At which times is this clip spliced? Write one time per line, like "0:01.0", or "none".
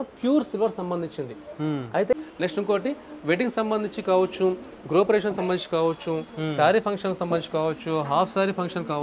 0:02.1